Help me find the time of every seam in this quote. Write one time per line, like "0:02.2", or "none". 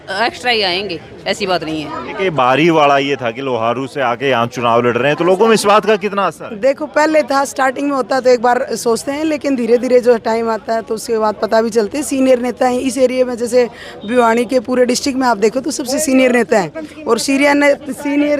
none